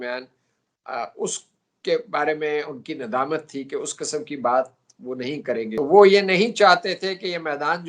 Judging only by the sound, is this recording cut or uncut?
cut